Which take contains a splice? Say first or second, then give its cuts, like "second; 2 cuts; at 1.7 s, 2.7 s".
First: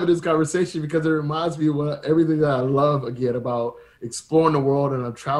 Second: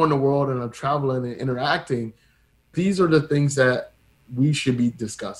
second; 1 cut; at 2.7 s